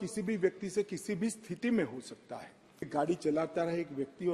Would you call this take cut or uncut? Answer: cut